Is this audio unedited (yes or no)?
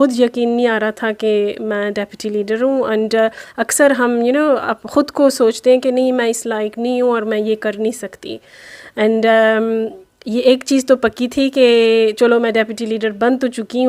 yes